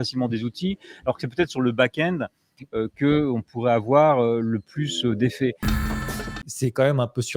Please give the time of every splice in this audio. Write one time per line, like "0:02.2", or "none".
0:06.1